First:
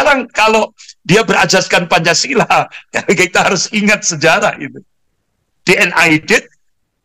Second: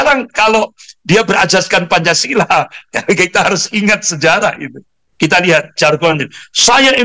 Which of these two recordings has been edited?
second; 1 cut; at 5.0 s

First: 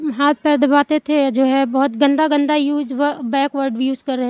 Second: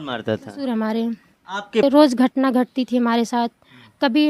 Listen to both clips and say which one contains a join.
second; 1 cut; at 1.8 s

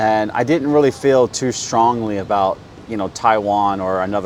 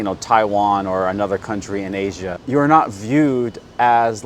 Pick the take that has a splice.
second; 1 cut; at 2.3 s

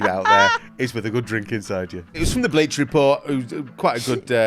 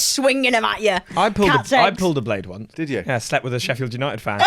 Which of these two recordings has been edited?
first; 1 cut; at 2.2 s

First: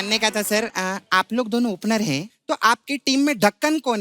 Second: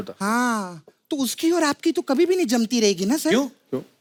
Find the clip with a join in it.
first; 1 cut; at 2.3 s

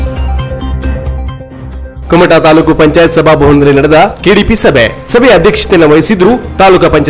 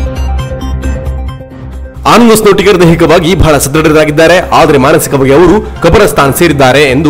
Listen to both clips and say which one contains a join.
first; 1 cut; at 1.8 s

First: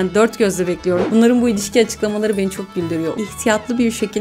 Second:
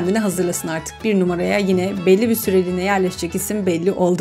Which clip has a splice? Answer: first; 2 cuts; at 1.0 s, 3.2 s

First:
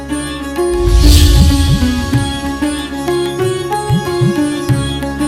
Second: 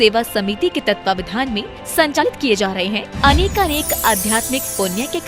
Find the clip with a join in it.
second; 1 cut; at 2.2 s

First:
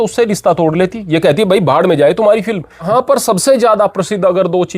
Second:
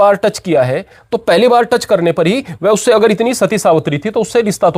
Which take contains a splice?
first; 1 cut; at 2.9 s

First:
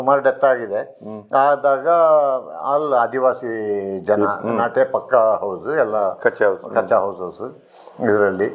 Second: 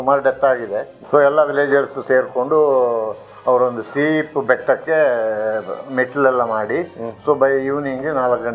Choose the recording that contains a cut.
second; 1 cut; at 1.0 s

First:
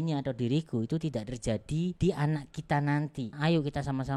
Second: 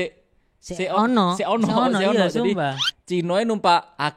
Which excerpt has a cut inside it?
first; 2 cuts; at 1.9 s, 3.3 s

